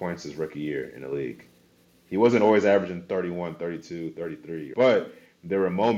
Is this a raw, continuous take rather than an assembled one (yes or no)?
no